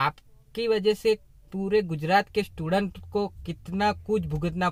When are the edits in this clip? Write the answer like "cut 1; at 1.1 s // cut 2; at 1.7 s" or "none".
none